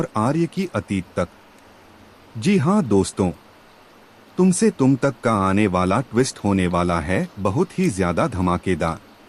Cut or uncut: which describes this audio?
uncut